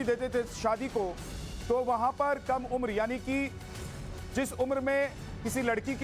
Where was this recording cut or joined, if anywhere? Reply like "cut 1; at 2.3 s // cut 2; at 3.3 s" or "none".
none